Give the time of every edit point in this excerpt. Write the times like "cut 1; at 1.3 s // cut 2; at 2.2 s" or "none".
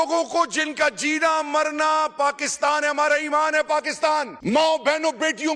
none

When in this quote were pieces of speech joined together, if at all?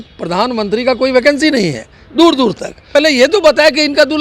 cut 1; at 2.9 s

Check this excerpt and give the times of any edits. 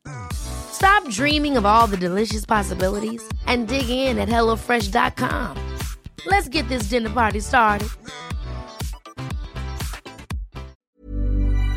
cut 1; at 10.7 s

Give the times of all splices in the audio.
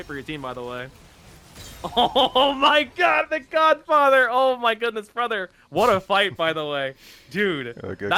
none

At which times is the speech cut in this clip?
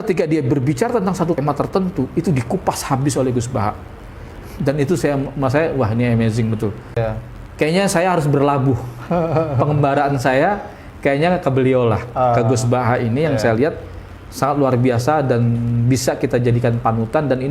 cut 1; at 1.4 s // cut 2; at 7.0 s

